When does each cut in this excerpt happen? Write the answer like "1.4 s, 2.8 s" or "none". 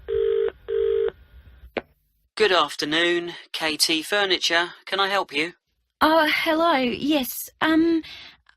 1.1 s